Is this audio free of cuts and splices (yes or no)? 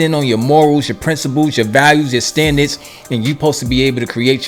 yes